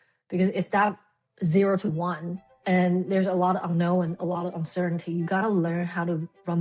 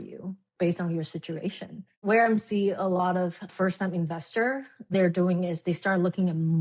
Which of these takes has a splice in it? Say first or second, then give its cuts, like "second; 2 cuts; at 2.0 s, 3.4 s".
second; 2 cuts; at 3.5 s, 4.9 s